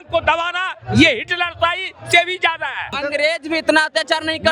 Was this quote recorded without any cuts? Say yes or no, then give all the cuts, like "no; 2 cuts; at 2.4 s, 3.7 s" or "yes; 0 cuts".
no; 1 cut; at 3.0 s